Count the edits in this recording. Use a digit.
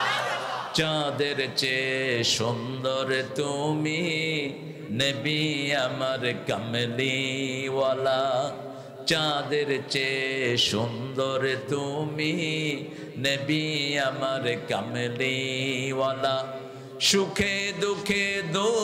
0